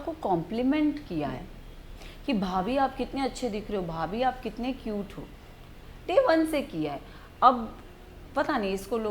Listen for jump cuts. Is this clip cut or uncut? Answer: uncut